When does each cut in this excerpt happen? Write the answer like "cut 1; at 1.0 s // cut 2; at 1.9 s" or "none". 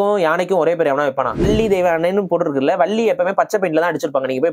cut 1; at 1.5 s